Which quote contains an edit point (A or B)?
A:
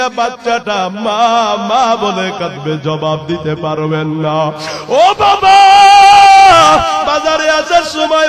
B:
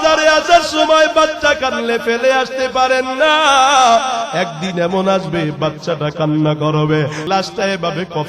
B